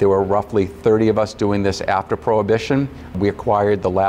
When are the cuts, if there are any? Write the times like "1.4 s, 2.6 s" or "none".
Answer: none